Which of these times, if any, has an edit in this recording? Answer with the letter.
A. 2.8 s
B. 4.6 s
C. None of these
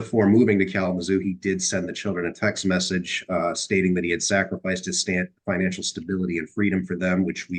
C